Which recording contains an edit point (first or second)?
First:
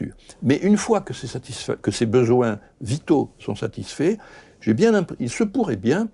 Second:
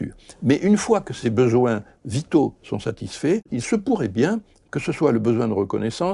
second